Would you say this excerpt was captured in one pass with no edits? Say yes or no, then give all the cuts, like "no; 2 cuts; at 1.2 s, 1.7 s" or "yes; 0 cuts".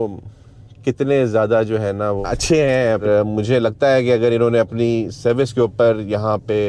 no; 1 cut; at 3.0 s